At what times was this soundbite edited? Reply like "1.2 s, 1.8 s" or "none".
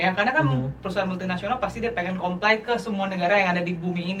none